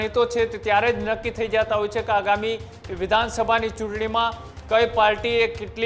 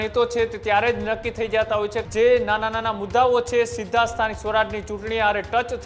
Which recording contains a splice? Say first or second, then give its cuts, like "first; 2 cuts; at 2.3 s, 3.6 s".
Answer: second; 1 cut; at 2.0 s